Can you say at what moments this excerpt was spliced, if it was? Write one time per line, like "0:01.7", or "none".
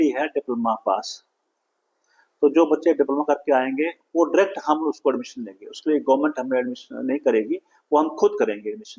none